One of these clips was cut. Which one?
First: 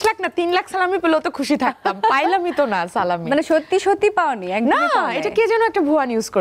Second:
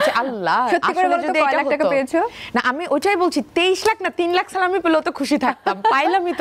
second; 1 cut; at 2.4 s

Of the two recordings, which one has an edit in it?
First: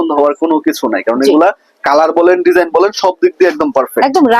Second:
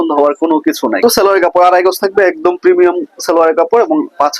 second; 1 cut; at 1.0 s

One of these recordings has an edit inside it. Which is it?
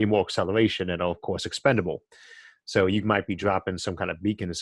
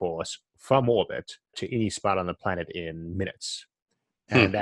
second; 1 cut; at 1.6 s

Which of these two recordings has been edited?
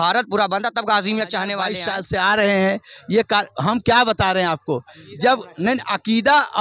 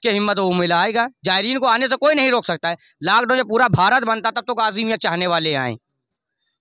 first; 1 cut; at 1.8 s

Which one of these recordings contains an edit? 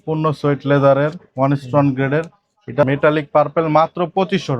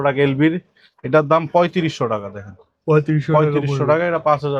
first; 1 cut; at 2.8 s

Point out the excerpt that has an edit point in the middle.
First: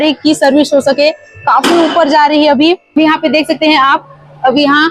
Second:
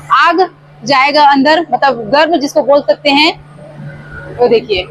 first; 1 cut; at 3.0 s

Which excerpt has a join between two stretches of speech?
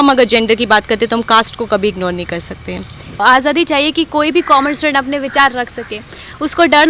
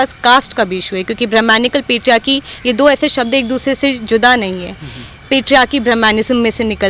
first; 1 cut; at 3.2 s

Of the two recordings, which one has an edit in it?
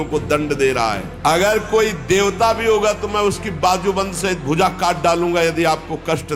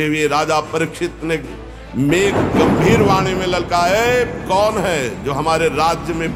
first; 1 cut; at 1.1 s

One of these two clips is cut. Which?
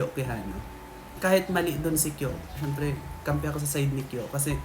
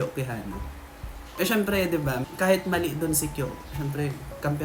first; 1 cut; at 1.1 s

